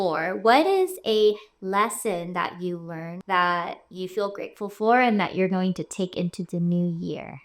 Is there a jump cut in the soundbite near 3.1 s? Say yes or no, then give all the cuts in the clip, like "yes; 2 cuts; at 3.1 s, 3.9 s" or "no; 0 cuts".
yes; 1 cut; at 3.1 s